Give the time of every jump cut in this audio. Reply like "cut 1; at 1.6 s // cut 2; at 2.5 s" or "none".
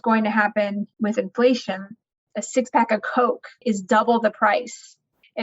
cut 1; at 0.9 s // cut 2; at 2.1 s // cut 3; at 3.6 s